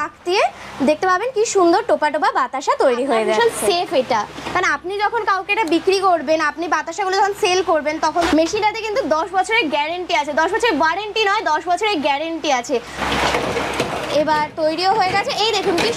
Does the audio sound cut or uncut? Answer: cut